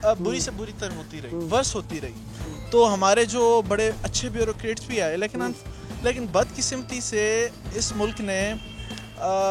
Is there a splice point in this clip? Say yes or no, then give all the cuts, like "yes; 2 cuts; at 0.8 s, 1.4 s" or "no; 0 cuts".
no; 0 cuts